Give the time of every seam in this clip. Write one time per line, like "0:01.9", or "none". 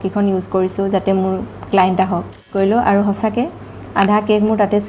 0:02.5